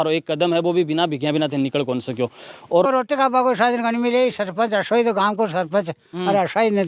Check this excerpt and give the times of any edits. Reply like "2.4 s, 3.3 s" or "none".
2.9 s